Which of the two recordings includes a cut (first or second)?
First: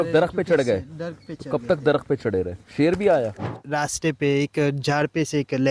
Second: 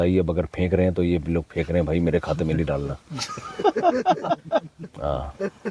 first